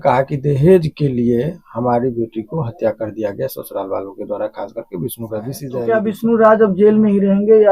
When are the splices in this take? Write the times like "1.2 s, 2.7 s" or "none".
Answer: 5.7 s